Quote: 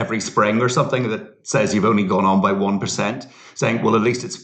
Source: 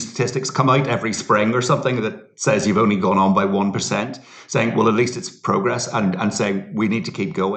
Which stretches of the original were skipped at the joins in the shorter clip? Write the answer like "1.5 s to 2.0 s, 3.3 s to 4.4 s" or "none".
none